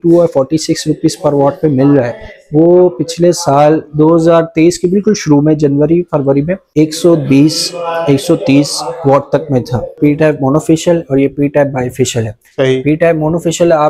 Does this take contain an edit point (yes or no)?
yes